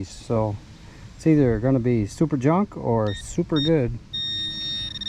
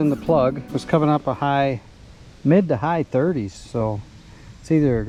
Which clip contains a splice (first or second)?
first